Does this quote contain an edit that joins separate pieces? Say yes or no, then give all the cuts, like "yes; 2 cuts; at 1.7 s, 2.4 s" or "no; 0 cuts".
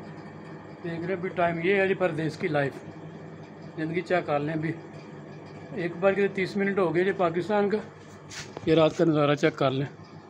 no; 0 cuts